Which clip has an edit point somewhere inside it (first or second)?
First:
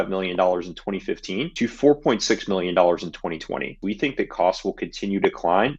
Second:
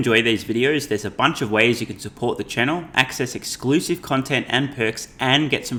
first